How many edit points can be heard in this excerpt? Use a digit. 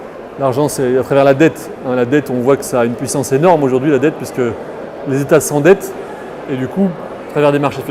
0